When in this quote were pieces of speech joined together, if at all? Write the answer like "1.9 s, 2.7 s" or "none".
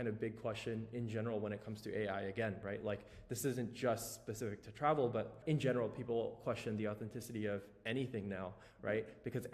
5.4 s